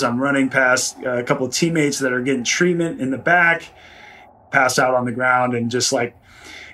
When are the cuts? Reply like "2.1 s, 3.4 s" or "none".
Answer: 4.4 s

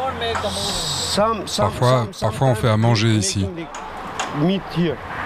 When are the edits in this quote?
none

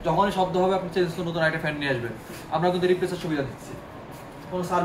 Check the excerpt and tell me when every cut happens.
none

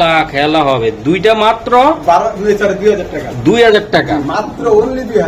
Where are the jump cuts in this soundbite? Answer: none

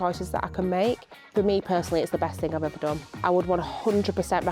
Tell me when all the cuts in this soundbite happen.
1.2 s

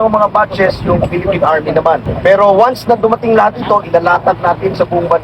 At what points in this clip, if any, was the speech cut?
2.1 s

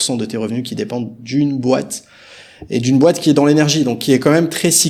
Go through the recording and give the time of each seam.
none

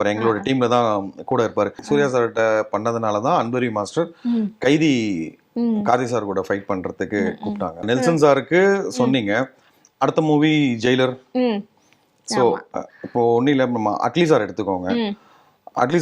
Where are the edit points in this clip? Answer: 1.8 s, 7.8 s

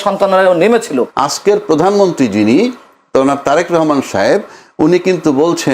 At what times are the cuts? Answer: 1.1 s

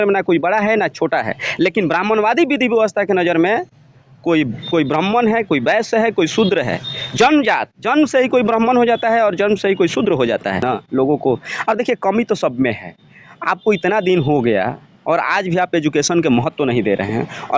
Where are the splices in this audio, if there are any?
10.6 s

